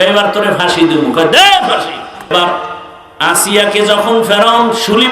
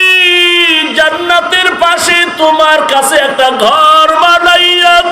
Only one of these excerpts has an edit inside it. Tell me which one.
first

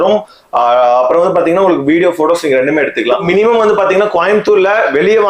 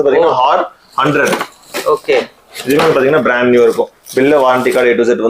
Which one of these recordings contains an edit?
first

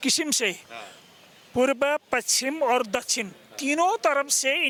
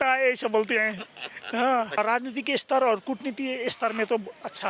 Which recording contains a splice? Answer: second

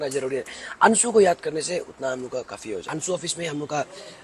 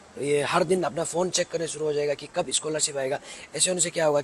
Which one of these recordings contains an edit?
first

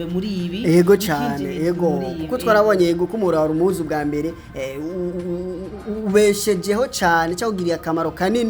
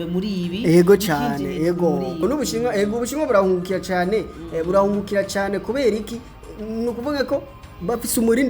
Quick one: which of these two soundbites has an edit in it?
second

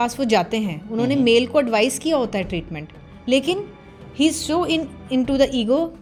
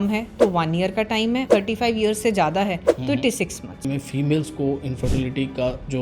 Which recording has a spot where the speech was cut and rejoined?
second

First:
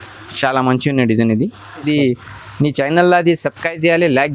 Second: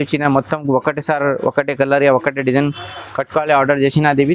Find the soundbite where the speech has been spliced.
first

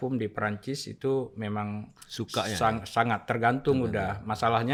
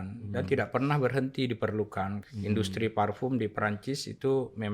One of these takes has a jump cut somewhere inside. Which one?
second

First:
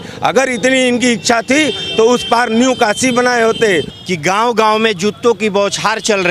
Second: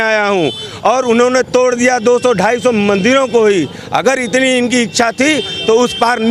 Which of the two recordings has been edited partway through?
first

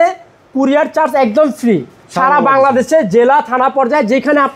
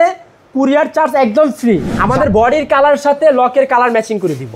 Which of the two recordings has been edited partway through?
second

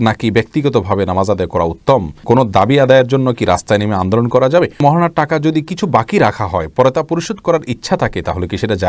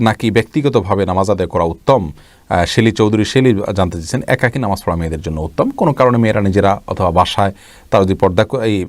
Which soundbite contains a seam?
first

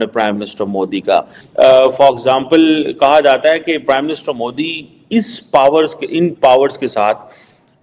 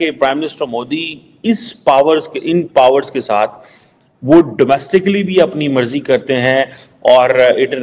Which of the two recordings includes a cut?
first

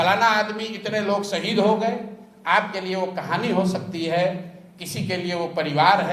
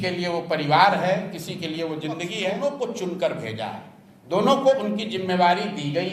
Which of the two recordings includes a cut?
second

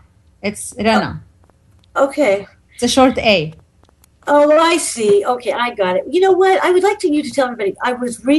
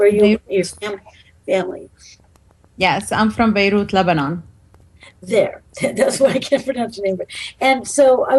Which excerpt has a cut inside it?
first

